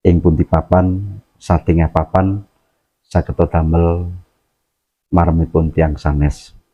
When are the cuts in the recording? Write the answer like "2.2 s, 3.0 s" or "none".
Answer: none